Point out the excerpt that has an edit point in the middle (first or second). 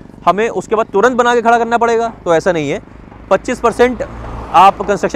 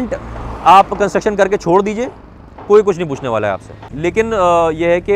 second